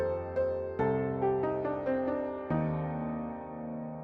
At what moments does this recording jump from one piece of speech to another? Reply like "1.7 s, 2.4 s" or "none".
1.5 s